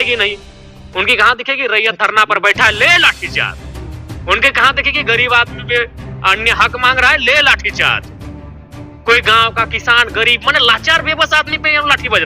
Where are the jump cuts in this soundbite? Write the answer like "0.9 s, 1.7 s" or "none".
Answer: none